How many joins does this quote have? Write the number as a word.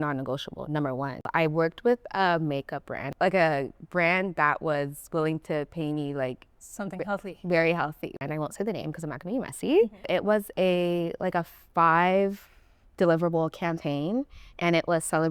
four